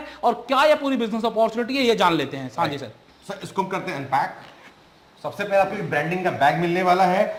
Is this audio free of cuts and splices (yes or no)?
yes